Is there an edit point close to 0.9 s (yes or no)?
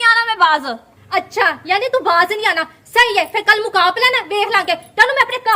yes